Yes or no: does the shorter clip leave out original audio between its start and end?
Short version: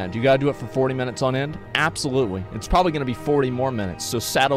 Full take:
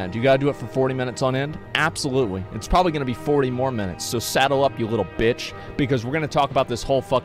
no